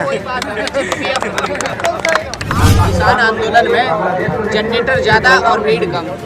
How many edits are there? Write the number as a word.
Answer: one